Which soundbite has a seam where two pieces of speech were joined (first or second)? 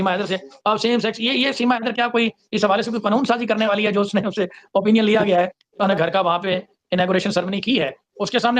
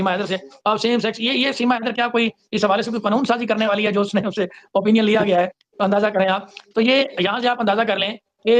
first